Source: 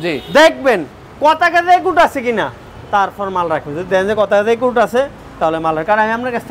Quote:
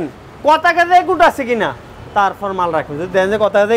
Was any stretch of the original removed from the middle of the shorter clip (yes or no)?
no